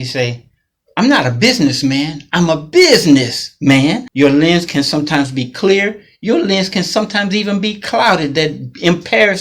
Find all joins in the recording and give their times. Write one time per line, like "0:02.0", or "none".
0:04.0